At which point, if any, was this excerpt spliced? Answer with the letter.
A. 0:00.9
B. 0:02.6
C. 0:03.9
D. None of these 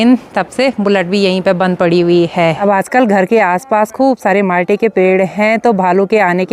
B